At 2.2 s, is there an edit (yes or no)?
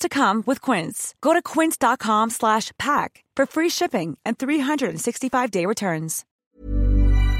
no